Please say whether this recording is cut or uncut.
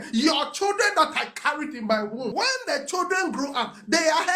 cut